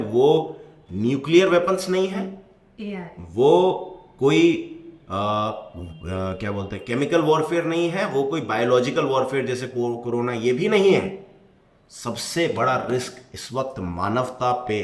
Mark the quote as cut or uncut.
uncut